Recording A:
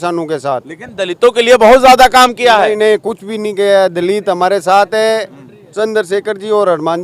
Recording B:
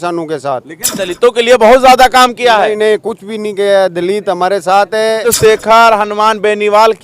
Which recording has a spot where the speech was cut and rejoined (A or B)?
B